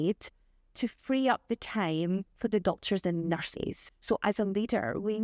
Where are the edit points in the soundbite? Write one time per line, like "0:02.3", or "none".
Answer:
0:03.8

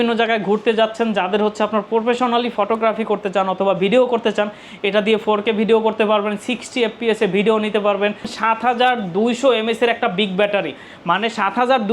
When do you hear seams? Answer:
0:08.3

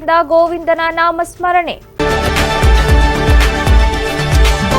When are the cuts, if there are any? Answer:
0:01.8

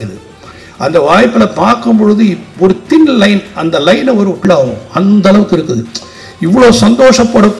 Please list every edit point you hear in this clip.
0:04.4

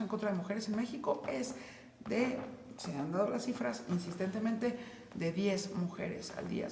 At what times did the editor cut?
none

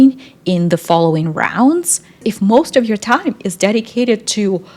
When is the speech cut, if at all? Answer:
0:02.2

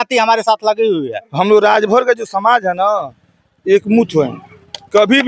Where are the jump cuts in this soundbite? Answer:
0:01.2

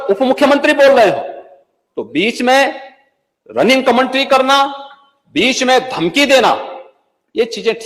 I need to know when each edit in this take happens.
none

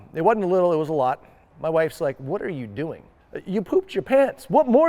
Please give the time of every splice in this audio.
0:01.4
0:03.4

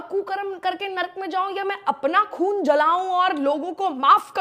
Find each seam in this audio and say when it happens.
none

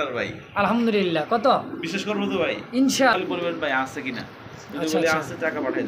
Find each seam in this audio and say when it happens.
0:03.1

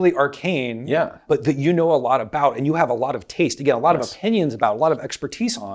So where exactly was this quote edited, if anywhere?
0:01.2

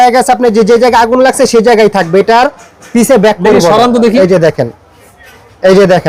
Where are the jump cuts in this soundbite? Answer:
none

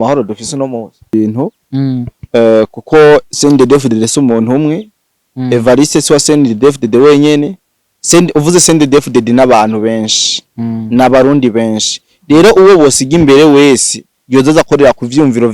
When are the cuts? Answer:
0:01.1

